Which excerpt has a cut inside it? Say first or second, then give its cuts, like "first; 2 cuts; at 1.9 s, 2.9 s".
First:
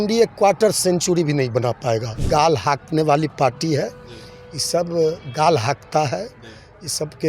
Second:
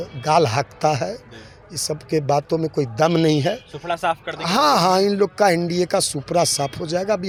first; 1 cut; at 2.2 s